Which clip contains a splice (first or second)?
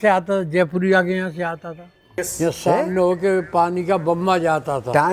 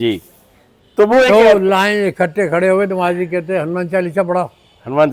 first